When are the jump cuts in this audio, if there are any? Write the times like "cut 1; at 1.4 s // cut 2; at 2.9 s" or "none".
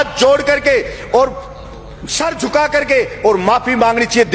none